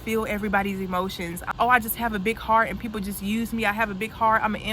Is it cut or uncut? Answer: cut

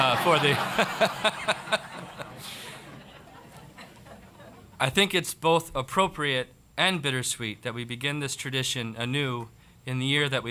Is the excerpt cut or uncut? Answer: uncut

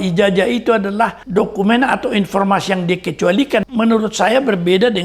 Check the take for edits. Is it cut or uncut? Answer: cut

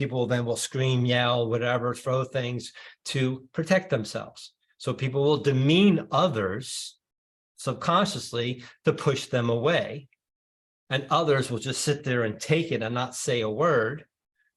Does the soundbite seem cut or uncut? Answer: uncut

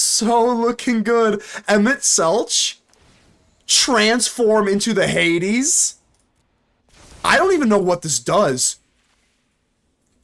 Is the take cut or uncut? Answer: uncut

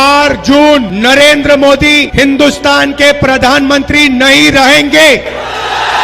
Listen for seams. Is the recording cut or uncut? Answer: uncut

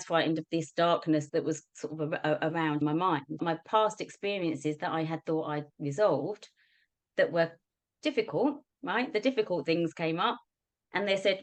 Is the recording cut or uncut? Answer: uncut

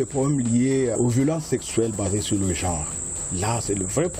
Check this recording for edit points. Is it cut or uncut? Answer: cut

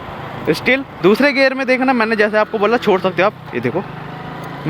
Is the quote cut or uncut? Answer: cut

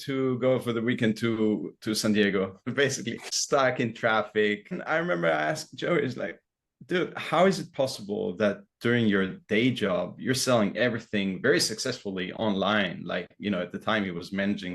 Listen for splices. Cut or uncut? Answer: cut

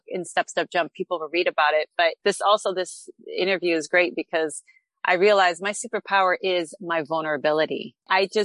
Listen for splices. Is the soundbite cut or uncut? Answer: cut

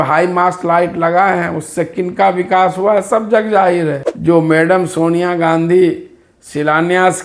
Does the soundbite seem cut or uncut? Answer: cut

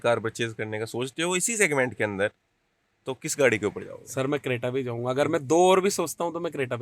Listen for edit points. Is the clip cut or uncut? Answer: uncut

